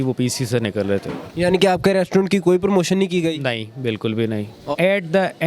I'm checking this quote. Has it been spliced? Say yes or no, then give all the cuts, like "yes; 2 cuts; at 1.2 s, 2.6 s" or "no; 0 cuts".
yes; 2 cuts; at 1.3 s, 4.6 s